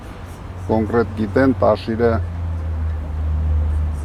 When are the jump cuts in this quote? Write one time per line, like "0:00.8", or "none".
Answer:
none